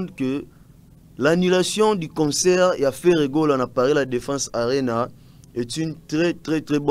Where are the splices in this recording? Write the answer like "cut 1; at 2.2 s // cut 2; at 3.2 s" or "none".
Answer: none

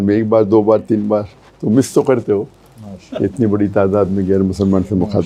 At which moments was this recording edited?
none

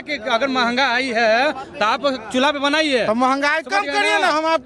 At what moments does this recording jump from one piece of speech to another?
none

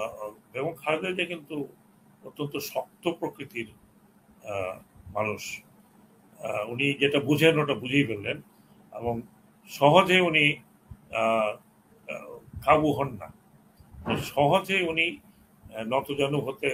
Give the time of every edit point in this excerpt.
none

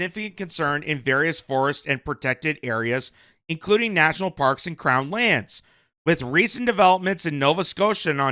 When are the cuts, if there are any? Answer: none

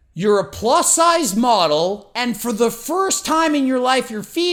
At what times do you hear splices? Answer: none

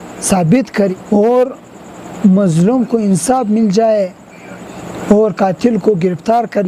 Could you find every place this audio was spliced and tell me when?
cut 1; at 0.9 s

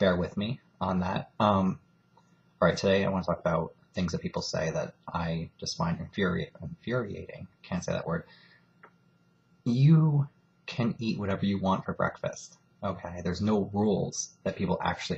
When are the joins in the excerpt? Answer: none

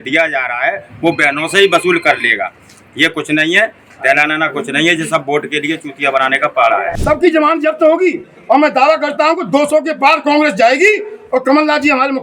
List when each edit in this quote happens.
cut 1; at 6.9 s

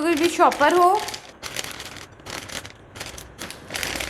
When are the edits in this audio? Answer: cut 1; at 1.3 s

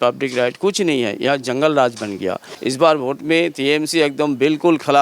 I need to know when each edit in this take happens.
cut 1; at 2.5 s

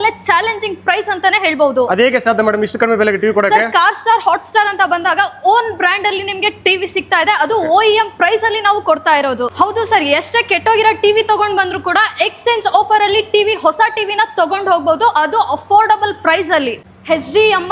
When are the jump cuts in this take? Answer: cut 1; at 9.5 s // cut 2; at 16.9 s

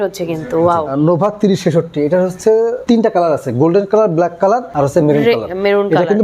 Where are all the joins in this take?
cut 1; at 0.9 s // cut 2; at 2.8 s // cut 3; at 4.7 s

